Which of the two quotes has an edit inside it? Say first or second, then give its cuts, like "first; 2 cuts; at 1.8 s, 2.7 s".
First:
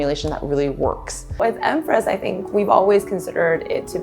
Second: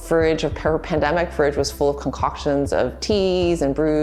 first; 1 cut; at 1.4 s